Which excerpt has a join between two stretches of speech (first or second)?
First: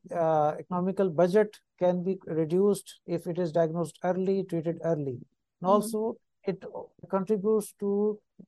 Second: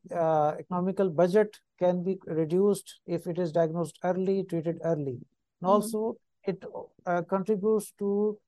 first